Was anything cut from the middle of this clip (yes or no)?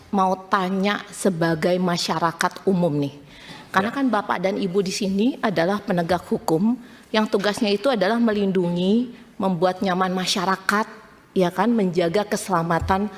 no